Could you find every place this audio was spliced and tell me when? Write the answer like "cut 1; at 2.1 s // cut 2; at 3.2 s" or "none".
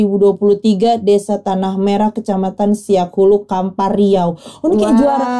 none